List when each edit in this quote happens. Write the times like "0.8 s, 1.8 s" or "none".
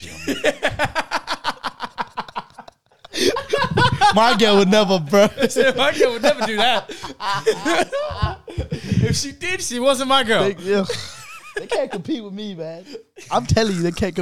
none